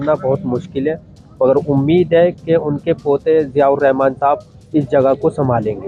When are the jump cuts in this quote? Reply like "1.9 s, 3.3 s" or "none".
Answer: none